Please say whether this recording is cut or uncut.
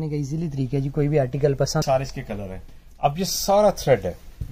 cut